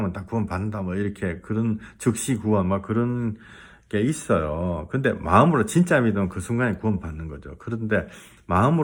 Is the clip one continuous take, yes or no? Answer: yes